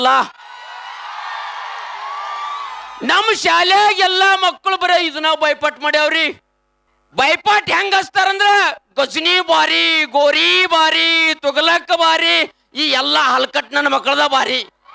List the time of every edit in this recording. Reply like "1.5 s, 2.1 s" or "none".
2.9 s